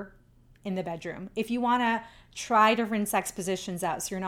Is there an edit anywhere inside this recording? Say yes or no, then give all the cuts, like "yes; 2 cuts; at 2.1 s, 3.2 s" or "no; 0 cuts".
no; 0 cuts